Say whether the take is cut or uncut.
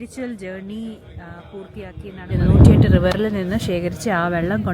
cut